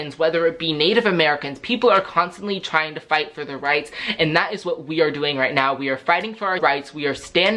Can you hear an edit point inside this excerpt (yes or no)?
yes